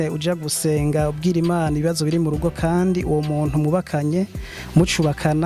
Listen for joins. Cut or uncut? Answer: uncut